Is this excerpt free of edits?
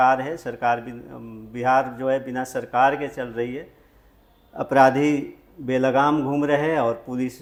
yes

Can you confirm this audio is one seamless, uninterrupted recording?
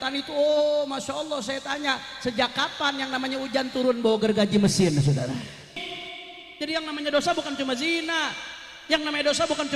no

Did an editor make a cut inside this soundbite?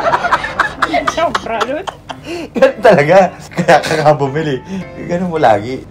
no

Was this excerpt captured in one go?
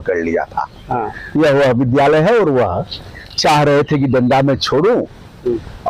yes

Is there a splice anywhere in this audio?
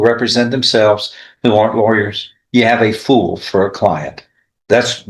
no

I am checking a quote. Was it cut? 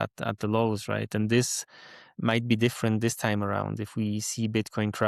no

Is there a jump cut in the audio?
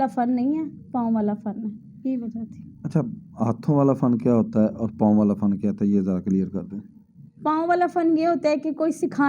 no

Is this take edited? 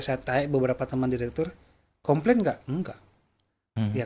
no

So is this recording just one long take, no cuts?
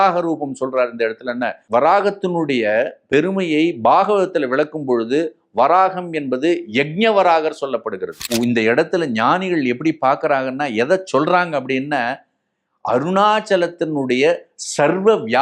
no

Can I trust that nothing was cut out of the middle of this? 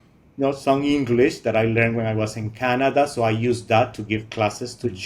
yes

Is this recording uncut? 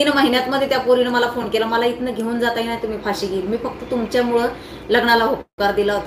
yes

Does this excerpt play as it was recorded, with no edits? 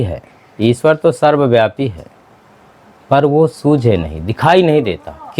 yes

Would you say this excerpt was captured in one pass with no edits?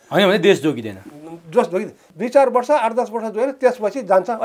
no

